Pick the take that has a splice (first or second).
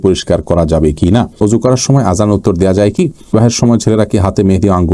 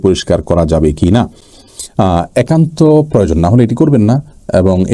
first